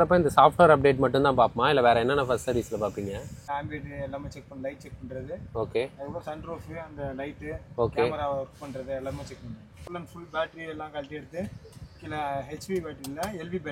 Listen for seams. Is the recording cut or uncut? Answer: cut